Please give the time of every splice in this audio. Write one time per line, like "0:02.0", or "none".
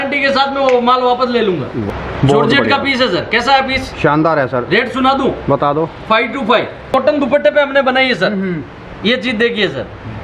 0:01.9
0:06.9

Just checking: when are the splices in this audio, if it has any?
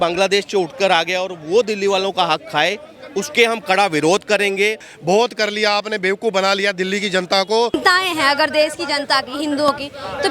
0:04.9
0:07.7

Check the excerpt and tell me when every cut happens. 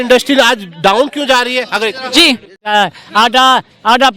0:02.7

